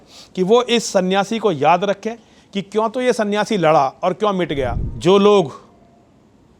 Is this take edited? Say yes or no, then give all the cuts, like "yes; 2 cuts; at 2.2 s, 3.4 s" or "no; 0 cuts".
yes; 1 cut; at 4.8 s